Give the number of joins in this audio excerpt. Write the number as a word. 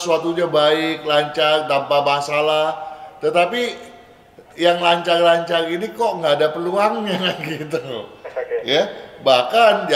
zero